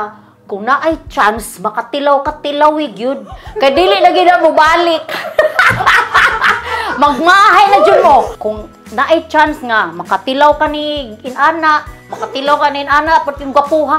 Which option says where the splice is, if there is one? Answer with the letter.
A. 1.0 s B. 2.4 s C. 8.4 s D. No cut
C